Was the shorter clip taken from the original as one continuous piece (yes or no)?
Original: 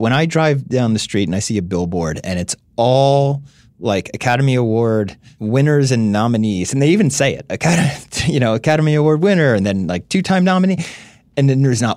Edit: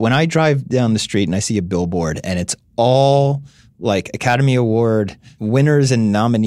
yes